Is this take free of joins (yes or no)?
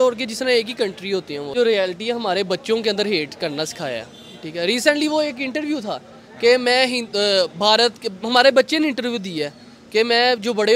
no